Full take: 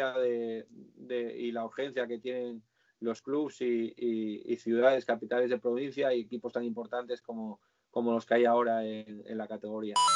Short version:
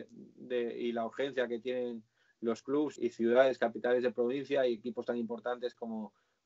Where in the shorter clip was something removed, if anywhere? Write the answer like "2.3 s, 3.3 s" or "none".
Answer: 2.9 s